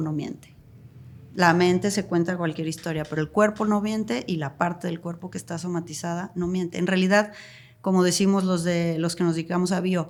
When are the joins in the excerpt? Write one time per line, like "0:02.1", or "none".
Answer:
none